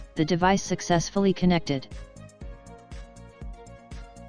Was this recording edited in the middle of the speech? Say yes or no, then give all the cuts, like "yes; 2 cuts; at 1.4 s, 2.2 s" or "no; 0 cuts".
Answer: no; 0 cuts